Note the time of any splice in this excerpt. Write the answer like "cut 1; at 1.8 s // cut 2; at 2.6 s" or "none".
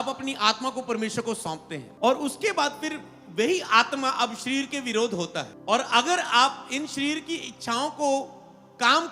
cut 1; at 1.8 s // cut 2; at 5.5 s